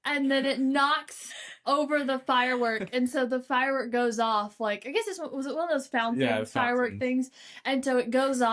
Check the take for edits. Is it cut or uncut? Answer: uncut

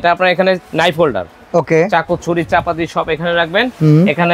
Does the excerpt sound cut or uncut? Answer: uncut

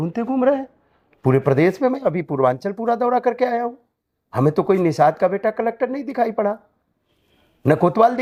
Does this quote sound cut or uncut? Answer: uncut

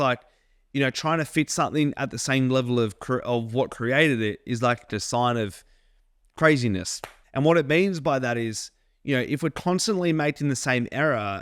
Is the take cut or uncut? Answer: uncut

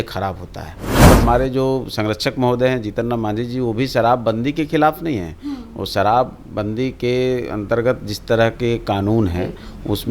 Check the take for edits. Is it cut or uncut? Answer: cut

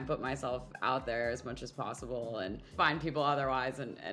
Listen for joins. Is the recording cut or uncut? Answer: cut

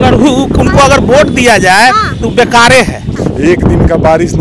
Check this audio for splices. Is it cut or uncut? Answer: cut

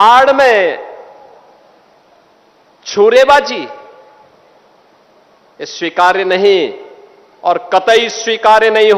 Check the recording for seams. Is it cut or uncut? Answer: uncut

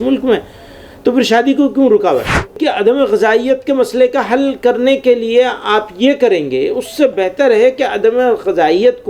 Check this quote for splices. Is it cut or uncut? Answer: cut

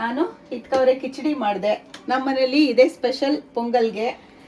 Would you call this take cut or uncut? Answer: uncut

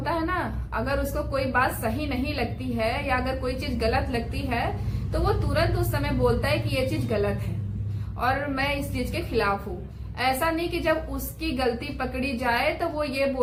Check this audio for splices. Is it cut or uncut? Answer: uncut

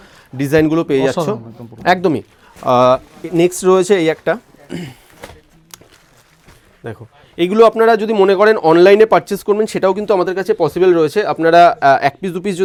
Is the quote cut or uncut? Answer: uncut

